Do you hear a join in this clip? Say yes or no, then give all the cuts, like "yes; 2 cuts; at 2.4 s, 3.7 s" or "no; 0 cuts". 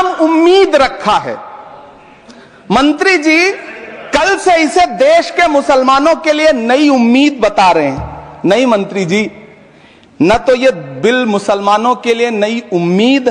no; 0 cuts